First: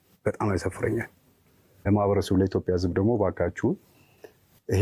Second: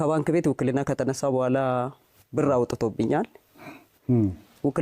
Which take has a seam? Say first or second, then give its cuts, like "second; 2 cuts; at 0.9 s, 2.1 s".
first; 1 cut; at 1.8 s